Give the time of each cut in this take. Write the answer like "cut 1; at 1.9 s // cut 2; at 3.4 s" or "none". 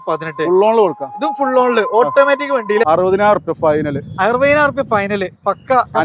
cut 1; at 2.8 s